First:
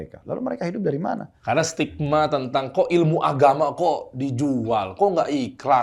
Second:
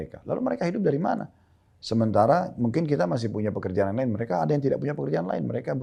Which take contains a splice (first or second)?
first